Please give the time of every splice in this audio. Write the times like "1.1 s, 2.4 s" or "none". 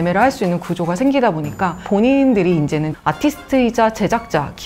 1.8 s